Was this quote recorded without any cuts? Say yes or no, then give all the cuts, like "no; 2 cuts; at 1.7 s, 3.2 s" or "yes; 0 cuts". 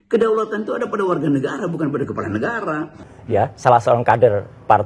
no; 1 cut; at 3.0 s